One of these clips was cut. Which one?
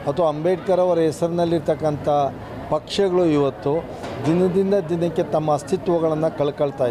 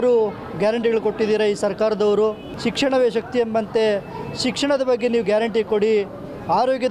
second; 1 cut; at 2.5 s

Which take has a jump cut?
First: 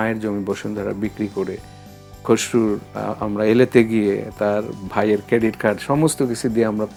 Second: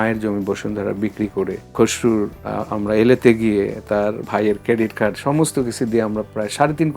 second; 2 cuts; at 1.6 s, 4.2 s

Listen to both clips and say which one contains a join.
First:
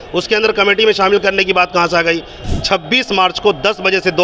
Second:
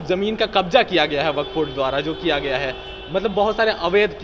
first; 1 cut; at 2.3 s

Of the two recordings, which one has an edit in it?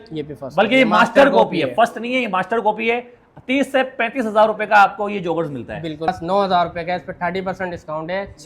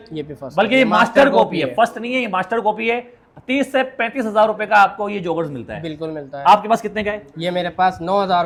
first; 1 cut; at 6.1 s

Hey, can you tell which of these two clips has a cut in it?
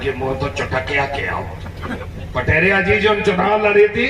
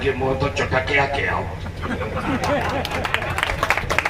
first; 1 cut; at 2.0 s

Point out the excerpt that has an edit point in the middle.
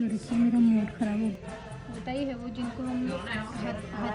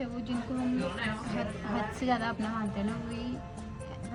first; 1 cut; at 1.4 s

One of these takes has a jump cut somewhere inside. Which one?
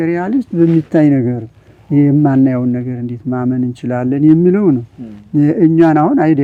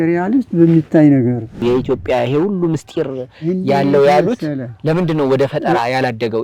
second; 1 cut; at 1.6 s

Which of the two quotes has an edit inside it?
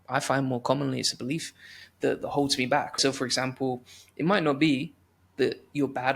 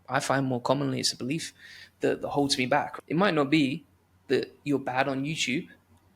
second; 1 cut; at 2.9 s

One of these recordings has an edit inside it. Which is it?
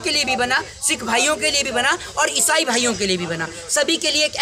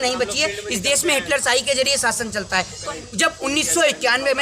second; 1 cut; at 2.8 s

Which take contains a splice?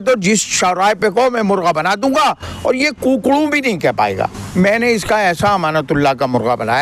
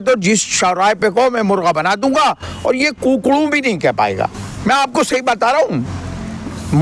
first; 1 cut; at 4.4 s

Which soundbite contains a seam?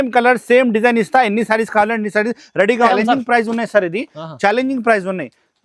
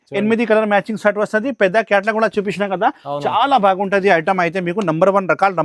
first; 1 cut; at 2.9 s

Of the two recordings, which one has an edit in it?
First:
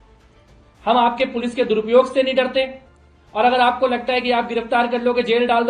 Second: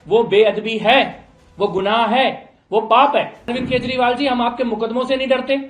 second; 1 cut; at 3.5 s

